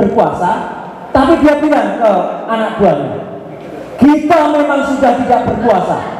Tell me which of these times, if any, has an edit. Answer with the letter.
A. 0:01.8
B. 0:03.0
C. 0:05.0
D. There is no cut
D